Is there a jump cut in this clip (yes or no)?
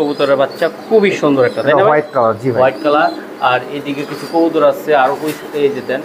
no